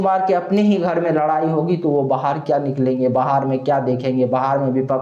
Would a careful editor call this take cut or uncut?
uncut